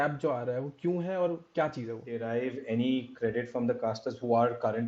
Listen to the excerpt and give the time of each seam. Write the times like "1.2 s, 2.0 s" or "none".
2.1 s